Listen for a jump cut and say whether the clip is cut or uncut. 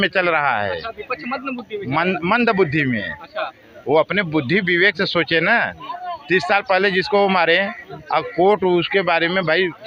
uncut